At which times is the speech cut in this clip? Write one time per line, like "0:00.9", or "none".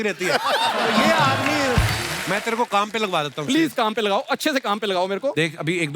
0:02.1